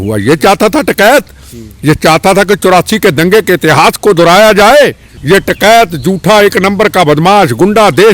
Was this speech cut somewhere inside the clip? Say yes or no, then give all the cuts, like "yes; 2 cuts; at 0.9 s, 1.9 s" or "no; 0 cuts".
yes; 1 cut; at 5.1 s